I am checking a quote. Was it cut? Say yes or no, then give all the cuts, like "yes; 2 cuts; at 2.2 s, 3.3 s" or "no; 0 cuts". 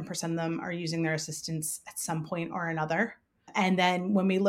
yes; 1 cut; at 3.5 s